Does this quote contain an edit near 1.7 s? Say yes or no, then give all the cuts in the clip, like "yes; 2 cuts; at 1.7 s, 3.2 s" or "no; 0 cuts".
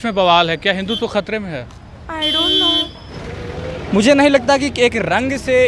no; 1 cut; at 3.0 s